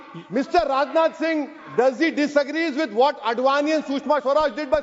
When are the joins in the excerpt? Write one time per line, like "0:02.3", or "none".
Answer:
none